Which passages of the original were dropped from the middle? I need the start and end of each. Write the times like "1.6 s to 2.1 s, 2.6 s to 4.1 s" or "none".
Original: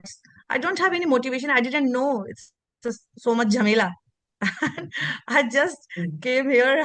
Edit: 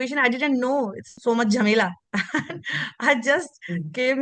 2.4 s to 3.1 s, 4.0 s to 4.3 s